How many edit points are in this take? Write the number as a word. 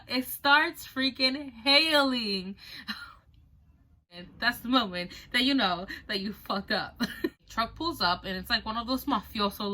two